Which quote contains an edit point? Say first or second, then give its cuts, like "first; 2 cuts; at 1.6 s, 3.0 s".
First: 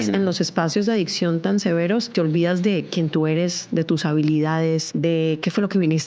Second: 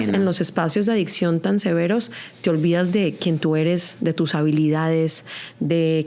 first; 2 cuts; at 2.1 s, 4.9 s